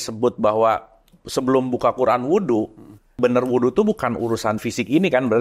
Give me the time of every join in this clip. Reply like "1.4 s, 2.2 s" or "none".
3.2 s